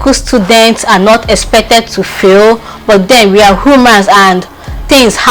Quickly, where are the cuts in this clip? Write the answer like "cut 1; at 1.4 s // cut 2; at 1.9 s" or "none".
none

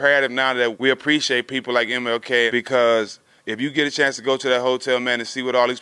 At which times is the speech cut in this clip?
cut 1; at 0.8 s // cut 2; at 2.5 s

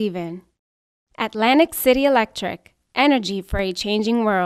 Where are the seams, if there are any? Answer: none

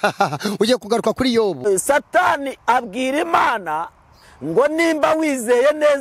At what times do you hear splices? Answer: cut 1; at 1.7 s

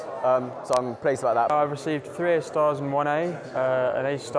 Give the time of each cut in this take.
cut 1; at 1.5 s

